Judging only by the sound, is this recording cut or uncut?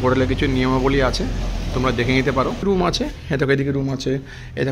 cut